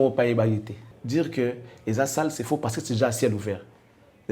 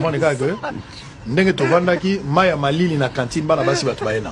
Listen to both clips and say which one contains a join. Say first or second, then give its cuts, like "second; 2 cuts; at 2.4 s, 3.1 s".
first; 1 cut; at 0.9 s